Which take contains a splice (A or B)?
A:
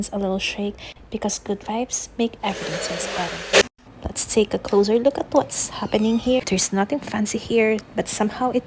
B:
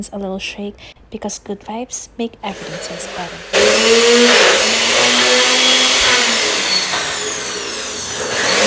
A